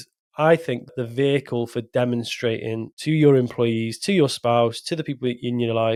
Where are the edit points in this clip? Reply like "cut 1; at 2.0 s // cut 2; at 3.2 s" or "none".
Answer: none